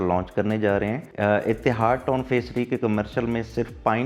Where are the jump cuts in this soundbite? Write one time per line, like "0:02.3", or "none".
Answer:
none